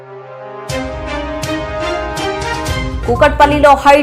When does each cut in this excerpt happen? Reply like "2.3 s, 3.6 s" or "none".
2.9 s